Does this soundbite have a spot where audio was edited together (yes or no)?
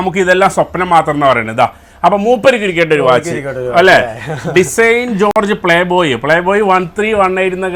no